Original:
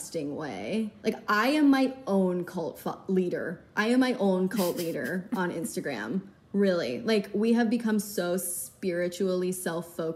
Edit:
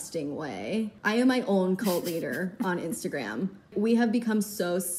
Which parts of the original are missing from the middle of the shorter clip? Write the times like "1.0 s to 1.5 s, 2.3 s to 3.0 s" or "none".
0.9 s to 3.7 s, 6.4 s to 7.3 s